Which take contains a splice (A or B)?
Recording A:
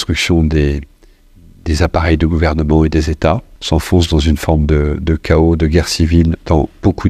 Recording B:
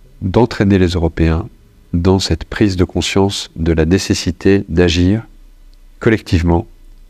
A